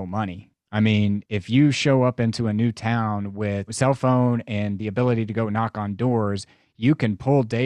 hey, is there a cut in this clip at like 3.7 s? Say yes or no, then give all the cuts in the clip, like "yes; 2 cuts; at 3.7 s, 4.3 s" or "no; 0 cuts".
yes; 1 cut; at 3.7 s